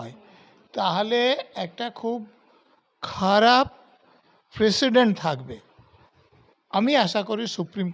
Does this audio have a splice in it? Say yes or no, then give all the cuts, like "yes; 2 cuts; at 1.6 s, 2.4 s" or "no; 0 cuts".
no; 0 cuts